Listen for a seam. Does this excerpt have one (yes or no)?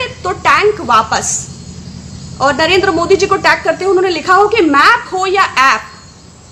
no